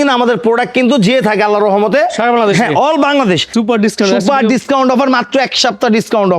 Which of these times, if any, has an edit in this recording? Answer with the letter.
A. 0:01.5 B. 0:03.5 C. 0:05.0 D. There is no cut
B